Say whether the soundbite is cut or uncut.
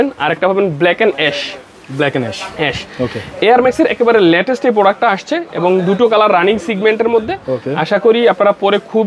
uncut